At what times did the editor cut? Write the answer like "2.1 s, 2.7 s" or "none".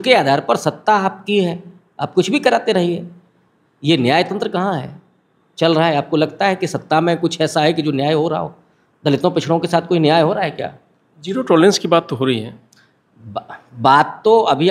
none